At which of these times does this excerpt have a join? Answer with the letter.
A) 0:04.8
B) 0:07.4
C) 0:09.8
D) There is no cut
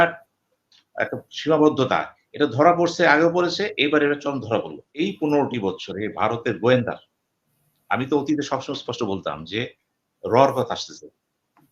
A